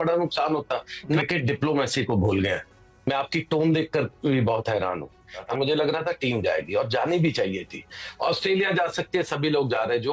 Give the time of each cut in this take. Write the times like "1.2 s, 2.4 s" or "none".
1.2 s, 5.4 s